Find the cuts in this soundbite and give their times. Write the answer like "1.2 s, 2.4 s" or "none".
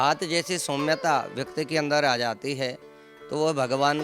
none